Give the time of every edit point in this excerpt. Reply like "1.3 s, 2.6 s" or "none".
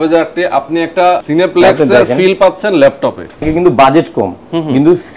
1.2 s, 3.4 s